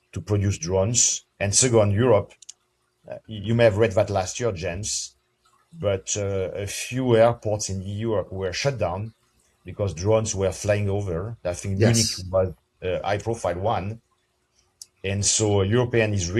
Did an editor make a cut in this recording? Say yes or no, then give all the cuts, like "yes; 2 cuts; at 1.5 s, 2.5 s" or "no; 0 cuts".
yes; 1 cut; at 1.2 s